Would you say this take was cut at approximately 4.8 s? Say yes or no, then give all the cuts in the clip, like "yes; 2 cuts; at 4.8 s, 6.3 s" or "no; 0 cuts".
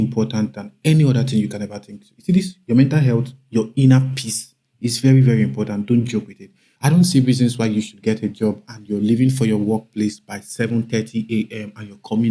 no; 1 cut; at 6.8 s